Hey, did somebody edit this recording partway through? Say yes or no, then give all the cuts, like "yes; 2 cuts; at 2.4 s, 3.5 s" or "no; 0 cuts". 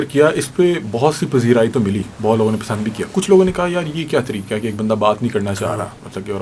no; 0 cuts